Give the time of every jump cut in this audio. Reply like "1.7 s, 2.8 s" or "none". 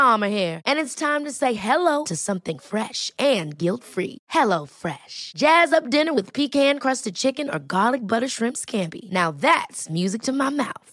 none